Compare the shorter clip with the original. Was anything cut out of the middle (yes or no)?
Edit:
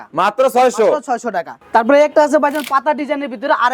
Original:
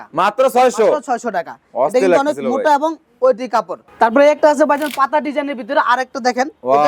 yes